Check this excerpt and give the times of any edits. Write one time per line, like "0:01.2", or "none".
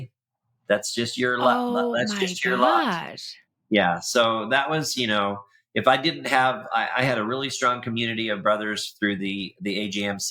none